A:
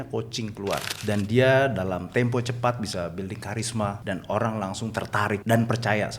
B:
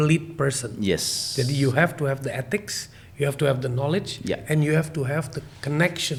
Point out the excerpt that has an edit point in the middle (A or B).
A